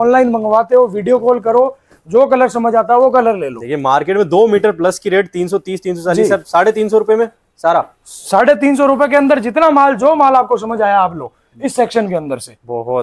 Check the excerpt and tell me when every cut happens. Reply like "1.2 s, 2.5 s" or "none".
none